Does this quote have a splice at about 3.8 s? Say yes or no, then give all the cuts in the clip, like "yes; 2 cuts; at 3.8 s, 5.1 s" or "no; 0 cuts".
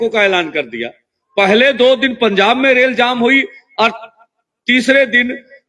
no; 0 cuts